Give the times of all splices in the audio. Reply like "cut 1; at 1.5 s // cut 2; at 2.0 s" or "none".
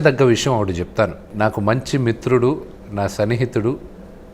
cut 1; at 1.3 s